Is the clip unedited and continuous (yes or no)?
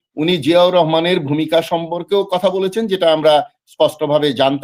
yes